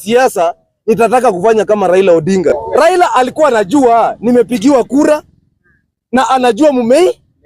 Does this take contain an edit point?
yes; 1 cut; at 2.6 s

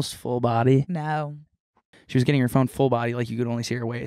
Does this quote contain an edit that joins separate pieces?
yes; 1 cut; at 1.9 s

